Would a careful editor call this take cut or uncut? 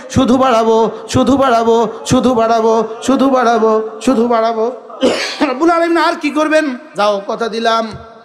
cut